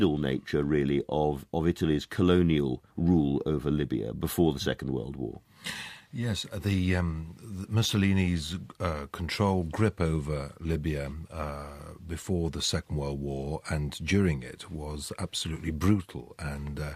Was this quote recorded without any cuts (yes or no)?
yes